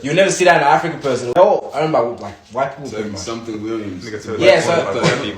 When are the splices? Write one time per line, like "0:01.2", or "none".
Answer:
0:01.4